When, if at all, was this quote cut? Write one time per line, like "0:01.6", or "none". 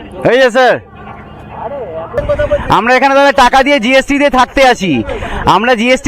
0:02.2